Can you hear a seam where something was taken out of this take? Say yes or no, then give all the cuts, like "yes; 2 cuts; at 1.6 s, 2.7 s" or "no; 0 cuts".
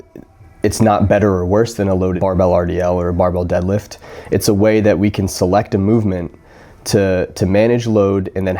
no; 0 cuts